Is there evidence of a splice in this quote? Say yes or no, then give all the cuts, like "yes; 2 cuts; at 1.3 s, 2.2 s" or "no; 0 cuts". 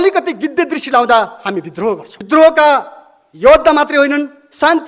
yes; 1 cut; at 2.1 s